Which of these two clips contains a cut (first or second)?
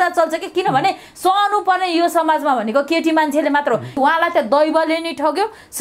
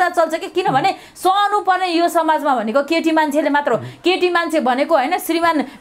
first